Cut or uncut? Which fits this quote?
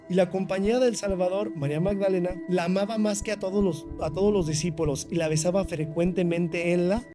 cut